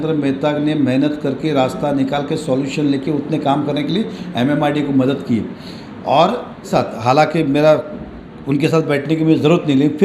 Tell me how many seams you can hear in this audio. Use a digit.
1